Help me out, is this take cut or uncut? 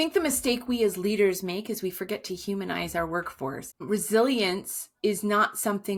uncut